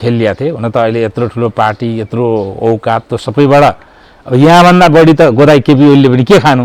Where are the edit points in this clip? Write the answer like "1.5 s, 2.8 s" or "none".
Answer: none